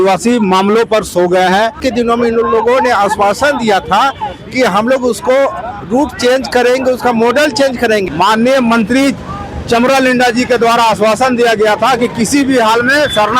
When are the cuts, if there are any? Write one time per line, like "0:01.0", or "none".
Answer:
0:01.8
0:08.0